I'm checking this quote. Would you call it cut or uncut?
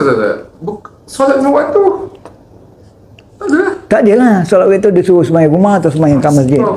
uncut